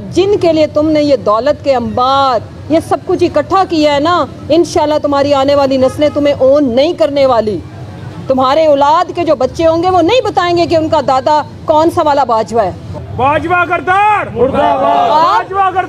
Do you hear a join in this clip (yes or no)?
yes